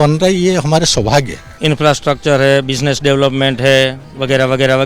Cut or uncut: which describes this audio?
cut